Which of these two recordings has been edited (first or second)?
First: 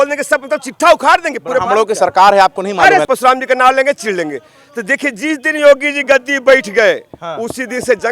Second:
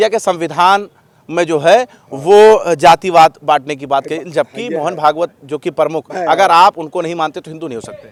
first